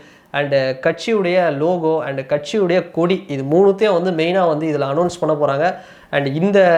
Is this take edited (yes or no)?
no